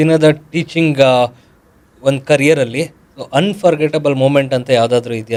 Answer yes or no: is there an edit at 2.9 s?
no